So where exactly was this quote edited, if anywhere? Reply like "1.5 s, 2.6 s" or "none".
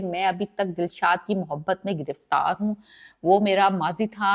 none